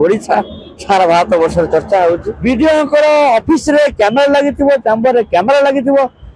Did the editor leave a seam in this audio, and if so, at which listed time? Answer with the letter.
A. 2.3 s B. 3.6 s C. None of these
A